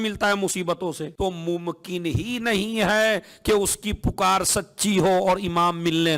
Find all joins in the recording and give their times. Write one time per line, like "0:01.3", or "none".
0:01.1